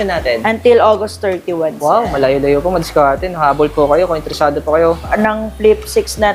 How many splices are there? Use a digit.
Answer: 1